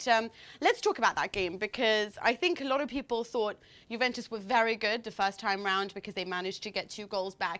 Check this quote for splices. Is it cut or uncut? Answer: uncut